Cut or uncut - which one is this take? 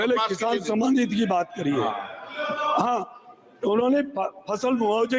uncut